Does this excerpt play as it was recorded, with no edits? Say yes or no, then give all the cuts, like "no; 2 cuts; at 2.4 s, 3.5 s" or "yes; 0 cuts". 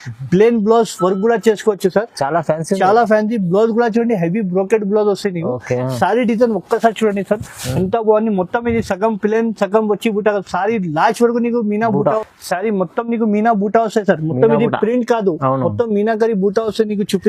no; 1 cut; at 12.2 s